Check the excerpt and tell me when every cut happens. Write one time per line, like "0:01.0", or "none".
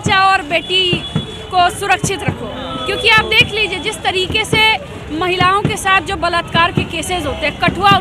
none